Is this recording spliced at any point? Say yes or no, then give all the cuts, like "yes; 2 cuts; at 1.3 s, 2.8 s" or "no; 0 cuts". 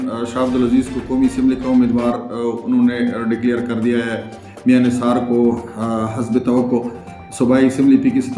no; 0 cuts